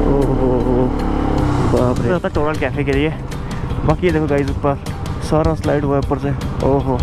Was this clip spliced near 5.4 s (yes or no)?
no